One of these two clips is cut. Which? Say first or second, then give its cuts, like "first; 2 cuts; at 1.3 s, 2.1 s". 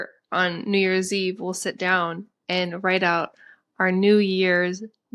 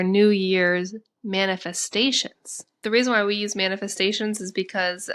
second; 1 cut; at 2.6 s